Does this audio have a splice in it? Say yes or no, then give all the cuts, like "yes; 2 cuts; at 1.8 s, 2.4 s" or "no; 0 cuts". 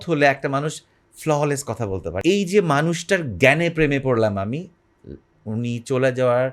yes; 1 cut; at 2.2 s